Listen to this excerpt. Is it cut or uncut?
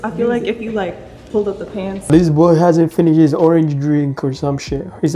uncut